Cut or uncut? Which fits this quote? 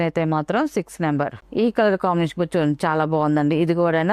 cut